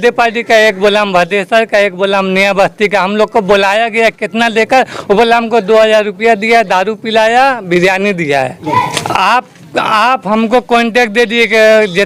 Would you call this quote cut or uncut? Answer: uncut